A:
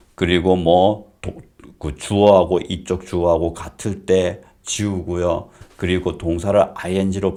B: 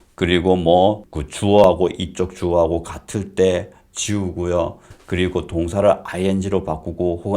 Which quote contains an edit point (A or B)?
B